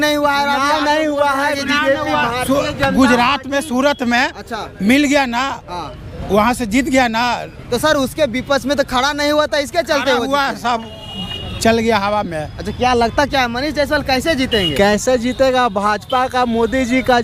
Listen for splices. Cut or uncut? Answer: uncut